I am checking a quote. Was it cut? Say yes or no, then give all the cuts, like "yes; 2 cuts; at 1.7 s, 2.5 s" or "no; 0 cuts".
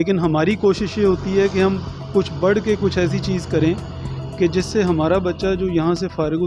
no; 0 cuts